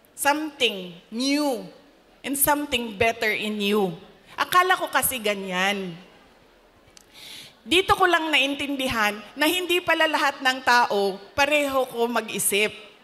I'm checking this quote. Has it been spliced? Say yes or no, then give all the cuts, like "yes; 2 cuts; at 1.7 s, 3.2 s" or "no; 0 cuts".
no; 0 cuts